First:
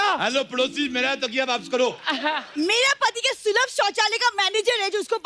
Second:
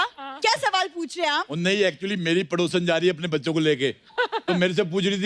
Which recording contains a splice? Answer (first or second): first